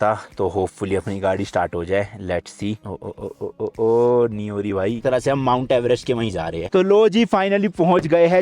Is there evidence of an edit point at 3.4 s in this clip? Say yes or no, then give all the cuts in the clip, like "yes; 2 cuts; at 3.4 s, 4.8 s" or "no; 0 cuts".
no; 2 cuts; at 5.0 s, 6.6 s